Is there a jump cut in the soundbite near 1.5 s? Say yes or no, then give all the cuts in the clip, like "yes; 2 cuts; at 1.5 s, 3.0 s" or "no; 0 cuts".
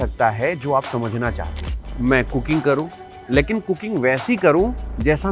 yes; 1 cut; at 1.5 s